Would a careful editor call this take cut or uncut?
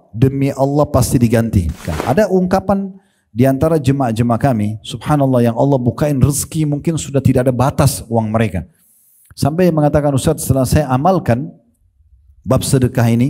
cut